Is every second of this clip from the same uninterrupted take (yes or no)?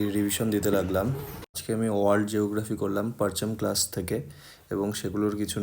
no